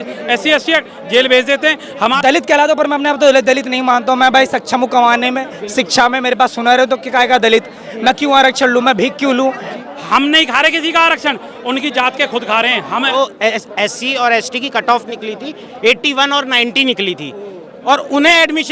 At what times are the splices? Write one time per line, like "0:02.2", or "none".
0:02.0
0:09.7
0:13.1